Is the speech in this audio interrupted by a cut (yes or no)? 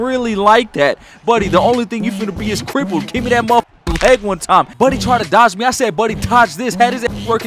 yes